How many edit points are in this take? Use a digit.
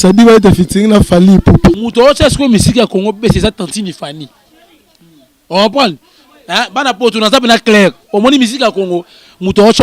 1